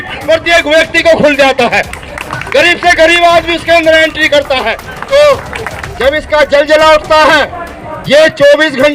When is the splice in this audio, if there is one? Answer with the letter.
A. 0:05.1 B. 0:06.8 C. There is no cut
A